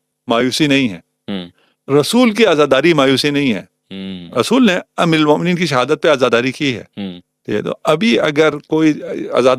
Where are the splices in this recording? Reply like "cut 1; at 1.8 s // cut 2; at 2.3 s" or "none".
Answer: none